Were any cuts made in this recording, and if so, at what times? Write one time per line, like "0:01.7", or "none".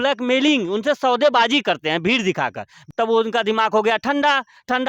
0:02.8